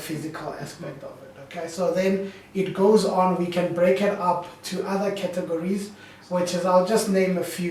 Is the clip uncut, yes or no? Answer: yes